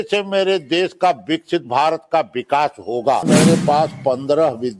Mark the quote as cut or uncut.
cut